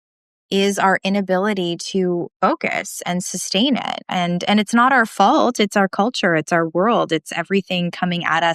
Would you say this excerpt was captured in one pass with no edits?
no; 1 cut; at 2.3 s

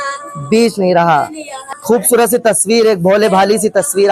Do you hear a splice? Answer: yes; 1 cut; at 1.7 s

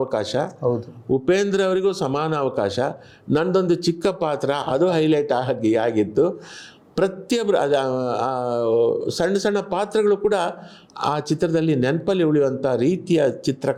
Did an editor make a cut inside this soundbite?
no; 0 cuts

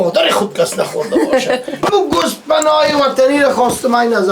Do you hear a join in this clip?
yes; 1 cut; at 1.8 s

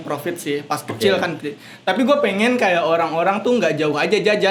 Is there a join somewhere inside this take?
no; 0 cuts

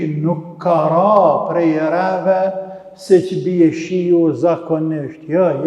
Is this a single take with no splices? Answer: yes; 0 cuts

